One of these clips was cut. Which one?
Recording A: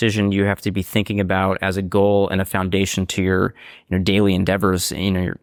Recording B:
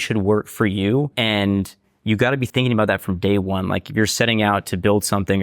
B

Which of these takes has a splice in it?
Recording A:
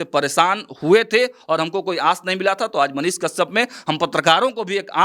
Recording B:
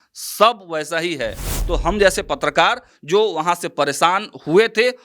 B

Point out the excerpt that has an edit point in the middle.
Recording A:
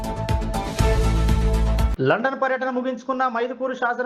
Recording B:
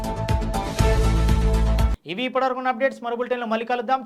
A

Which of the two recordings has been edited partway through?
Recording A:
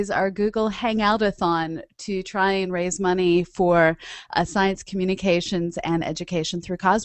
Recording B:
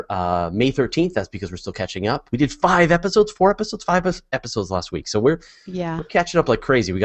B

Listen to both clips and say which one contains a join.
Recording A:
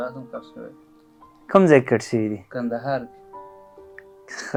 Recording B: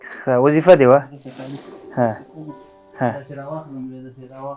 B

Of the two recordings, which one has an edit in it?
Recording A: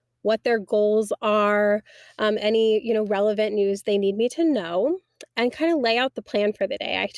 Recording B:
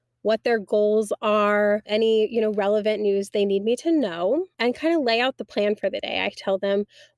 B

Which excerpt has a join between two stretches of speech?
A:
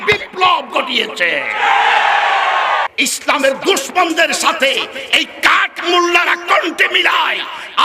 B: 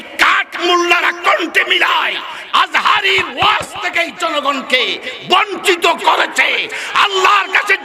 A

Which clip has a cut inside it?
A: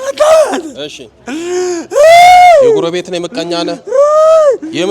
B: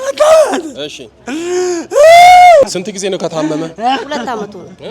B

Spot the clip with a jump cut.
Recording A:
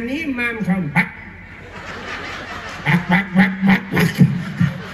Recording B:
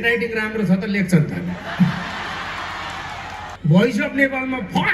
B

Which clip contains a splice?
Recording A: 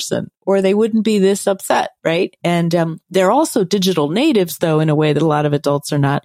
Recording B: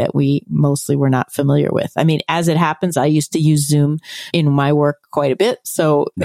B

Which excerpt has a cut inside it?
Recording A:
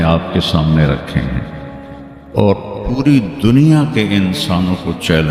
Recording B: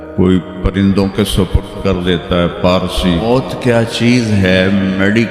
B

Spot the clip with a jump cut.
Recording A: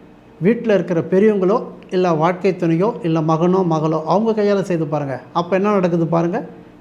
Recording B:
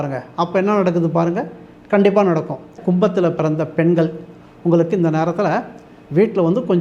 B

